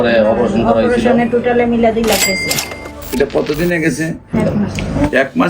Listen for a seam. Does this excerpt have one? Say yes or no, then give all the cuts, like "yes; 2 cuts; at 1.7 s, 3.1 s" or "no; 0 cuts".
yes; 1 cut; at 4.3 s